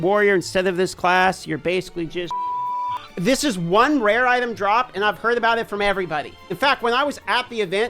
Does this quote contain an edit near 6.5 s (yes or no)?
yes